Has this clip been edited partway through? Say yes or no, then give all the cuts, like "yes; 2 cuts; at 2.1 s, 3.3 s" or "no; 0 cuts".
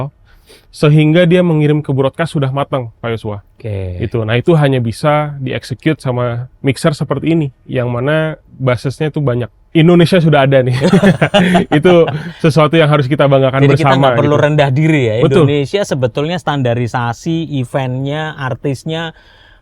yes; 1 cut; at 9.6 s